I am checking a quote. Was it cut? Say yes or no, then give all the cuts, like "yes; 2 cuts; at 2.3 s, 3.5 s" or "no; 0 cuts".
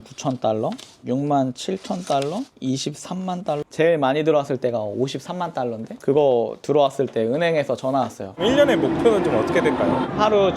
yes; 4 cuts; at 0.9 s, 2.5 s, 3.7 s, 8.4 s